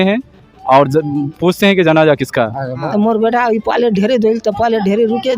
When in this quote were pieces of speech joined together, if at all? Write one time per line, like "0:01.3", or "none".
0:02.6